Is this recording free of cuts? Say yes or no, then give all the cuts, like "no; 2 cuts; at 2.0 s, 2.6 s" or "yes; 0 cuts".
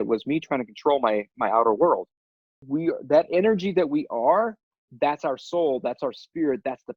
no; 1 cut; at 2.6 s